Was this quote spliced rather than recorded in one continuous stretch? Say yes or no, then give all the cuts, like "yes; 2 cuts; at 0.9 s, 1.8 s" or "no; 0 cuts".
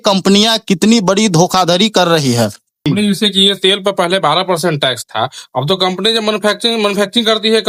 no; 0 cuts